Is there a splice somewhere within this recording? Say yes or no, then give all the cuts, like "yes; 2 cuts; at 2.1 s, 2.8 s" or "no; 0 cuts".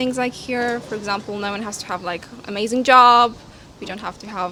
no; 0 cuts